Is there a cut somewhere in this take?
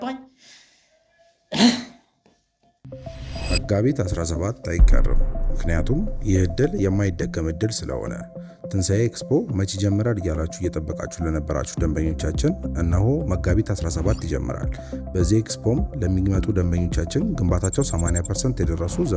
yes; 1 cut; at 2.7 s

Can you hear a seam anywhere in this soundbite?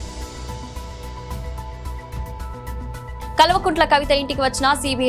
no; 0 cuts

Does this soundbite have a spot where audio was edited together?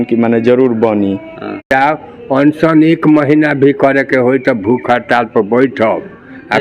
yes; 1 cut; at 1.7 s

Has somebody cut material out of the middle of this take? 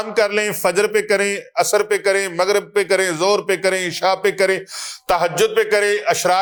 no; 0 cuts

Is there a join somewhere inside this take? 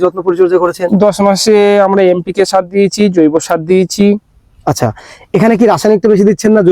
no; 0 cuts

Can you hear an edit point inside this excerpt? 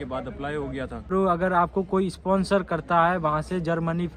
yes; 1 cut; at 1.1 s

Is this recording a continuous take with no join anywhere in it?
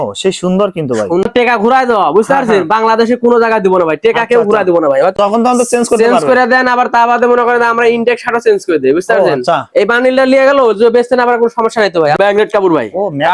no; 3 cuts; at 1.2 s, 5.1 s, 12.2 s

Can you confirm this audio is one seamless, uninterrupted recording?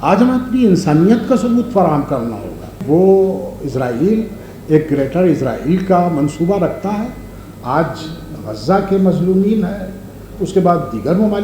no; 1 cut; at 2.8 s

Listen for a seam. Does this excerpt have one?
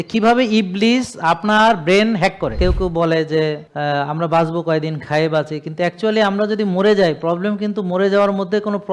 yes; 1 cut; at 2.6 s

